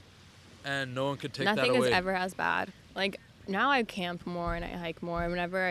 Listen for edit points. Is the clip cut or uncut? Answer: cut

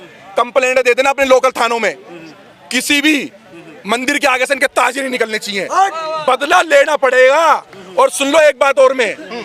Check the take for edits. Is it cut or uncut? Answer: uncut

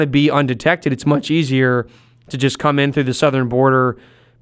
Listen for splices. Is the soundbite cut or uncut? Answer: uncut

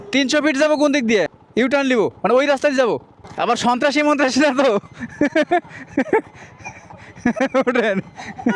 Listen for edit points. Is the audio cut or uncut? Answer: uncut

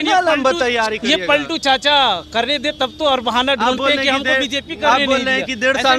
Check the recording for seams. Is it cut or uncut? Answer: uncut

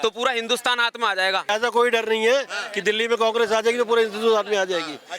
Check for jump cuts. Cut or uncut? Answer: cut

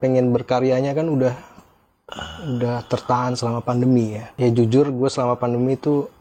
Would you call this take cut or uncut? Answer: cut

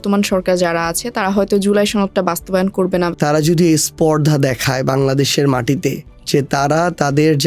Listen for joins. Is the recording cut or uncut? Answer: cut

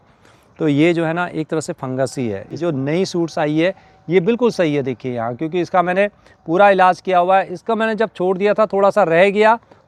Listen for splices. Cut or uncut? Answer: uncut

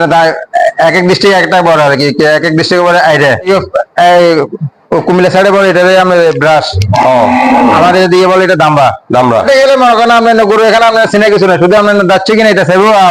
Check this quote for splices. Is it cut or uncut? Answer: cut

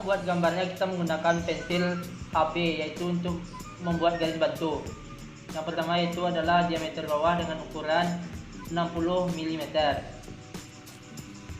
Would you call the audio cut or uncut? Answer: cut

